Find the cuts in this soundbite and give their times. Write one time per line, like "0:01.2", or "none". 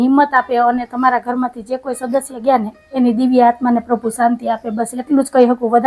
none

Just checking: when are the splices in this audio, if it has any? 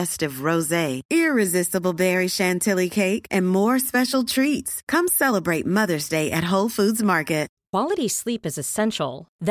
0:07.6

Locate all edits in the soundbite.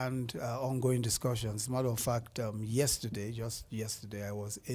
0:02.5

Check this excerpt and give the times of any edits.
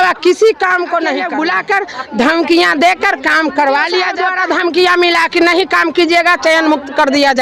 0:01.3
0:04.2

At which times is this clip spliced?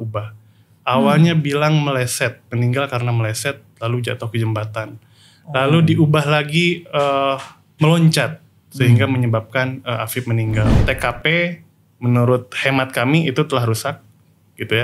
0:10.8

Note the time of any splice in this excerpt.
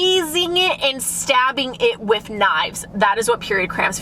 none

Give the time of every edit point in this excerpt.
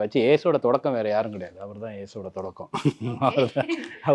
none

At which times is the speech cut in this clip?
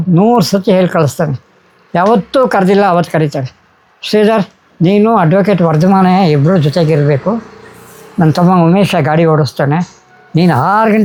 none

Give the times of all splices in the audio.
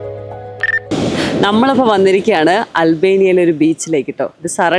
0:00.9

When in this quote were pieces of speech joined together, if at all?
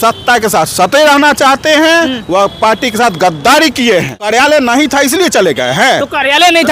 0:04.2

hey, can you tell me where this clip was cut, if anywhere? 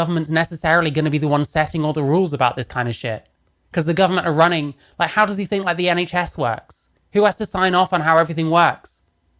none

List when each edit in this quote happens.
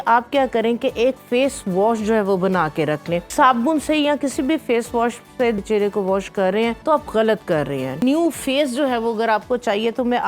0:03.3
0:05.6
0:06.8
0:08.0

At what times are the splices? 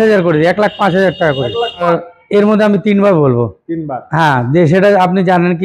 0:01.9

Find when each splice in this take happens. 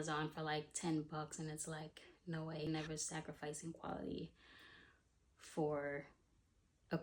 0:02.7

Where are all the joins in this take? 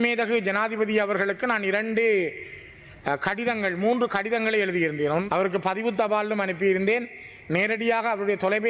0:05.2

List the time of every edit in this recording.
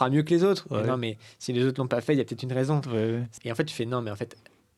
0:03.3

